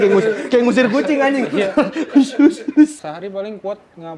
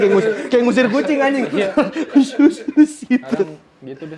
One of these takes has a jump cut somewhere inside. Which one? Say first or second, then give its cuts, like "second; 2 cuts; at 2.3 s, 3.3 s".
first; 1 cut; at 3.0 s